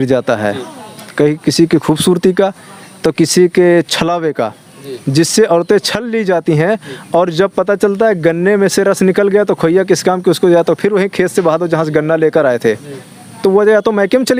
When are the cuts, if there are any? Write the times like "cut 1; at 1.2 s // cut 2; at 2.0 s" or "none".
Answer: none